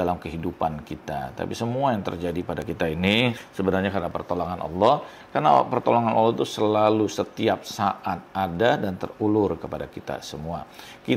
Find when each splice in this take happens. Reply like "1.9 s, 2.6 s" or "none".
3.4 s